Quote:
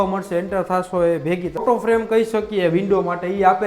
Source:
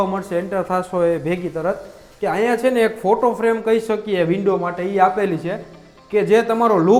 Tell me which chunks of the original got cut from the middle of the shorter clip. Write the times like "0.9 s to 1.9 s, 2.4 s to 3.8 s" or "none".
1.6 s to 3.2 s